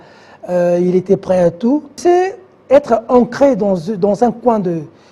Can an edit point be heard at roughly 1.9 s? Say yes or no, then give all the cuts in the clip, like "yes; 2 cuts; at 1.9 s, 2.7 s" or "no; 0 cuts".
yes; 1 cut; at 1.9 s